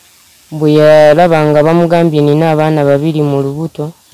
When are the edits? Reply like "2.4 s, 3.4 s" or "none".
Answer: none